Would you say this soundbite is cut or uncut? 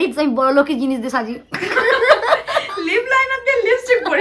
uncut